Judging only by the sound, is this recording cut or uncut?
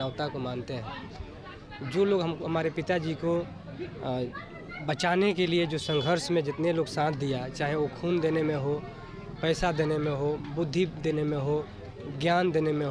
uncut